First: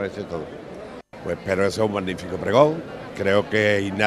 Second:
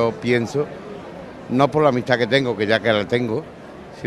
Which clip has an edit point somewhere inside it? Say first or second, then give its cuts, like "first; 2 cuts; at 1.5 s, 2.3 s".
second; 1 cut; at 2.6 s